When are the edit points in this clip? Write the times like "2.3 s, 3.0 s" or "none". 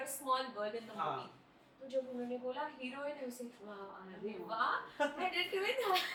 none